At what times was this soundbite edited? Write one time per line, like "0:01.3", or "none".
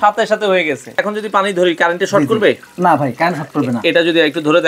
0:01.0
0:02.7